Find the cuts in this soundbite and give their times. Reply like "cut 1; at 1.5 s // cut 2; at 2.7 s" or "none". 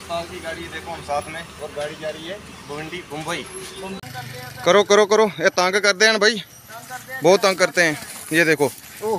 cut 1; at 4.0 s